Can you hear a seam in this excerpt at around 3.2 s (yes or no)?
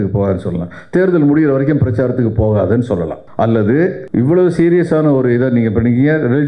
yes